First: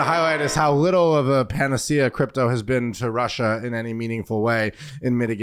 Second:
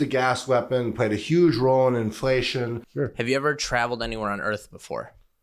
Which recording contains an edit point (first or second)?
second